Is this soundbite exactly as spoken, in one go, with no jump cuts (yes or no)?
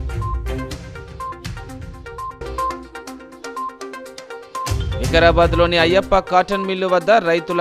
no